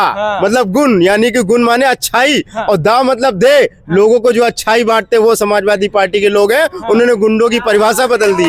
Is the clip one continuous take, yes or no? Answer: yes